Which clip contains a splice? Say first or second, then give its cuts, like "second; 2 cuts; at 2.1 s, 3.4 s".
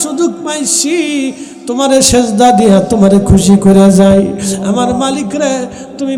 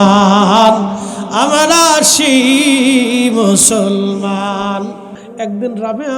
second; 1 cut; at 5.2 s